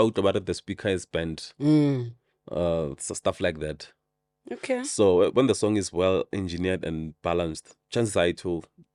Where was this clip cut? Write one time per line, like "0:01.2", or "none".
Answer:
none

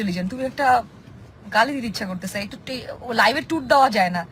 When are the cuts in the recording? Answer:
none

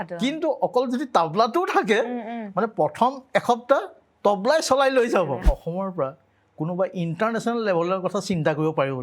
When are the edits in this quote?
0:05.5

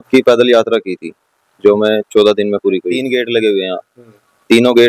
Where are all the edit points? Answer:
0:03.0

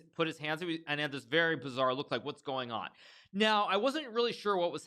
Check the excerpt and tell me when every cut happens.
none

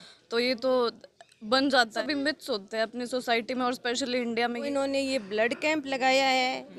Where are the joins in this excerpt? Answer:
0:01.9
0:04.7

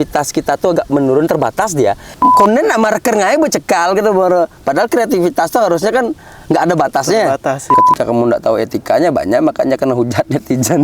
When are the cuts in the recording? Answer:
0:02.1
0:07.7

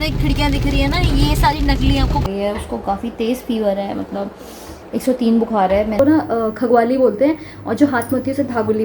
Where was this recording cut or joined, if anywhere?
0:02.2
0:06.0

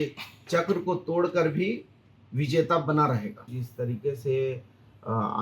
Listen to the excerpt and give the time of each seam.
0:03.6

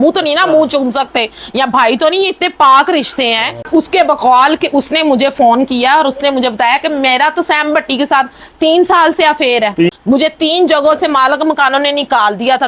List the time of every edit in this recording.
0:03.7
0:09.9

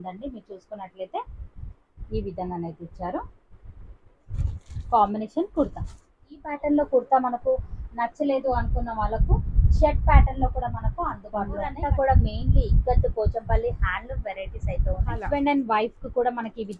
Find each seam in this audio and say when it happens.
0:06.5
0:11.8
0:15.2

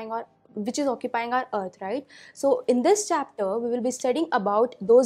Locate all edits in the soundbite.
0:02.3

